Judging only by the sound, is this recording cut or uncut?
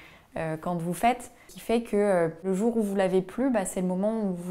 cut